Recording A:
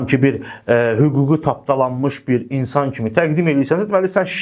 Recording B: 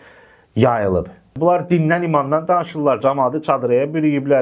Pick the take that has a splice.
B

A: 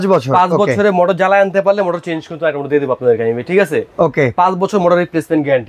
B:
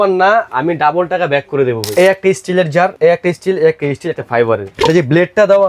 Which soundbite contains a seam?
B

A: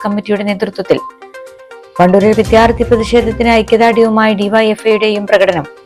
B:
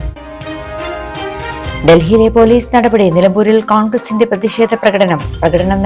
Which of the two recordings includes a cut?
B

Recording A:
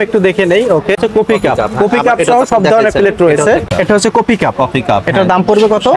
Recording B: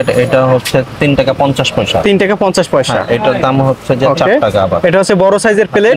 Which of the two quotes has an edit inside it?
A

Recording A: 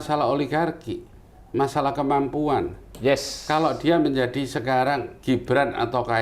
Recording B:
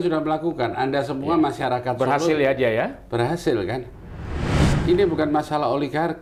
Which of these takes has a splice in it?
A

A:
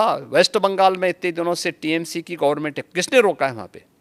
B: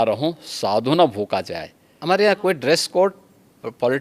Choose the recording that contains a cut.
B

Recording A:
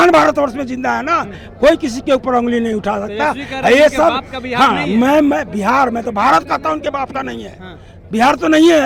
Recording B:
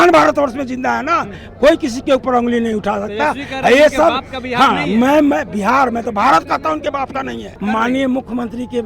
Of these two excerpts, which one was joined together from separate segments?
B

